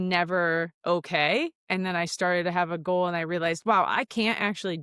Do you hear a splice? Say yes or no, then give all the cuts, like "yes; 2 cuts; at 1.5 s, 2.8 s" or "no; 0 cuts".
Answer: no; 0 cuts